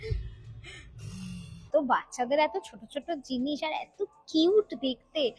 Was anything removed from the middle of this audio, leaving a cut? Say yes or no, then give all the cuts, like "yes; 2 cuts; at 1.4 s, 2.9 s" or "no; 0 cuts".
yes; 1 cut; at 1.7 s